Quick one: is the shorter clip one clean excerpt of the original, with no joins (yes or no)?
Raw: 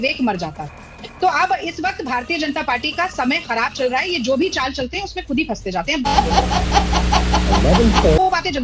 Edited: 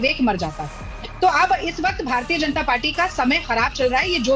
yes